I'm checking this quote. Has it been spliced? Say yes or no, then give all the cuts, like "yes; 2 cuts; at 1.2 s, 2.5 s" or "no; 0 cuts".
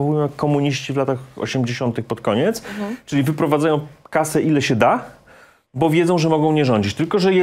no; 0 cuts